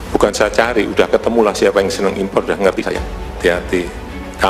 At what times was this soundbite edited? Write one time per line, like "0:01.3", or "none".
0:03.3